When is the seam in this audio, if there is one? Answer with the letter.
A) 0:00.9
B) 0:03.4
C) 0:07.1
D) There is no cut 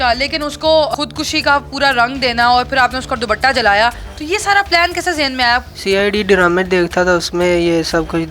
A